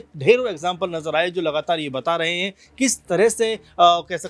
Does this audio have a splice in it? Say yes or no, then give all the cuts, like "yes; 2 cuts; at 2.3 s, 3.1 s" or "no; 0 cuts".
no; 0 cuts